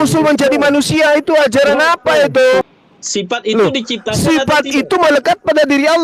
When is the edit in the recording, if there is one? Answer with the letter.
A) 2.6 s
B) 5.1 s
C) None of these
A